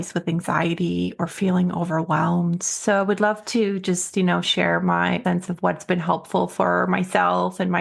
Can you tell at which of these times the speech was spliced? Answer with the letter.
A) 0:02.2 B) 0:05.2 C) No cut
B